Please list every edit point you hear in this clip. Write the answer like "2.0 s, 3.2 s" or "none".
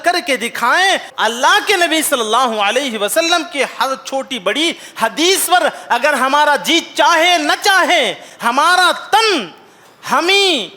1.1 s